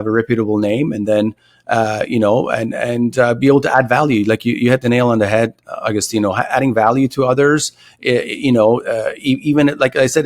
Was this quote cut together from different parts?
no; 0 cuts

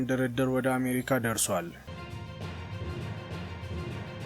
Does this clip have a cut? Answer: yes; 1 cut; at 1.9 s

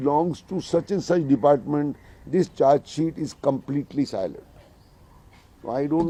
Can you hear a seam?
no; 0 cuts

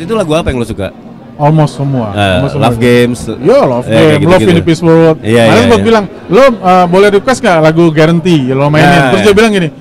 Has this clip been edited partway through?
no; 0 cuts

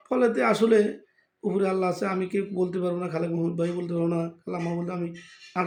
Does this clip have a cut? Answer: no; 0 cuts

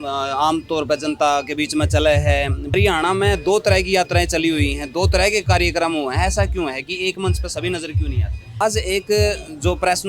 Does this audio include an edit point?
yes; 2 cuts; at 2.7 s, 8.6 s

